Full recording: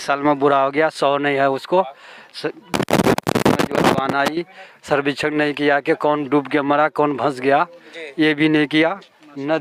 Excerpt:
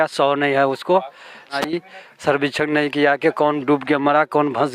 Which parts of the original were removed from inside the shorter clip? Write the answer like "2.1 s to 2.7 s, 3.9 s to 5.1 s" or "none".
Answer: 2.4 s to 4.2 s